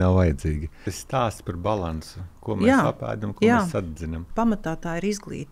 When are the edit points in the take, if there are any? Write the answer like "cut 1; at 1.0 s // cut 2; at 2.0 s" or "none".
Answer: cut 1; at 1.0 s // cut 2; at 4.2 s